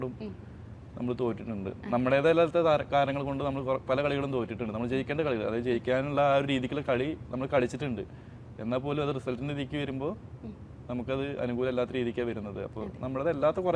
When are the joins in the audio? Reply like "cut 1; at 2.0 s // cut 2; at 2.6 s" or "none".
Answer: none